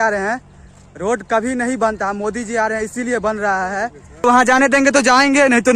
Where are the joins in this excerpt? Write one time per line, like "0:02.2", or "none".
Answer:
0:04.2

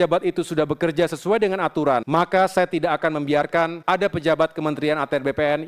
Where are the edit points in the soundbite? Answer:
0:02.0

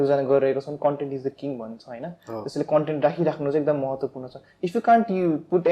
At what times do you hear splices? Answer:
none

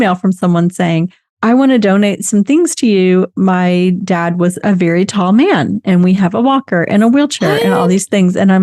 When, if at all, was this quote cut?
none

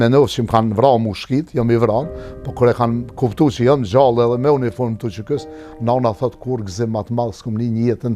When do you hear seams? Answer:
none

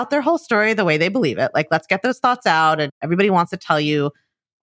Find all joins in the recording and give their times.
0:02.9

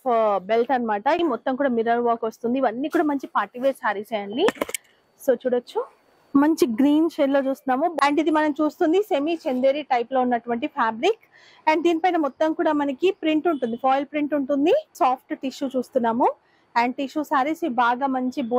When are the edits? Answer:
0:01.2
0:07.9
0:14.9

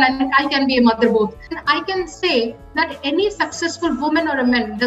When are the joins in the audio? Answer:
0:01.4

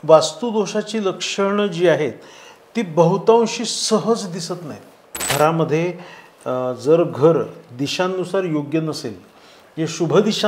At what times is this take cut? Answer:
0:05.3

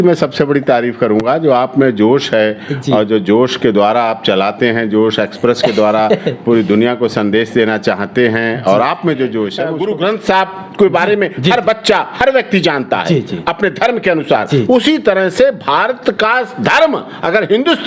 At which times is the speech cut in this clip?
0:09.6

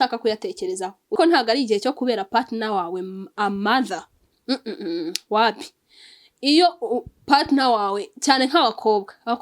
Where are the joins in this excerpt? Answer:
0:01.2

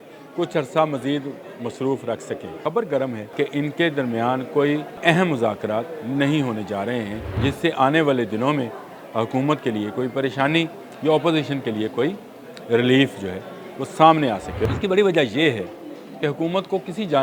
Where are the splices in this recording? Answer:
0:02.5
0:03.3
0:04.9
0:07.2
0:14.7

